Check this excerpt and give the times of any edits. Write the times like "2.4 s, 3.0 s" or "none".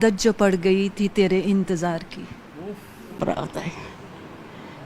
3.2 s